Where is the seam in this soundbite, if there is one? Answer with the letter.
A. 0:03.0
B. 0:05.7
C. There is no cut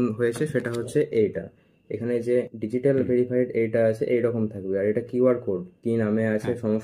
B